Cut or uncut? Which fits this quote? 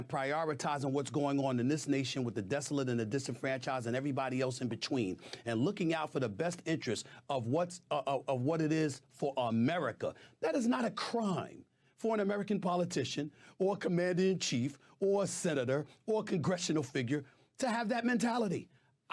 cut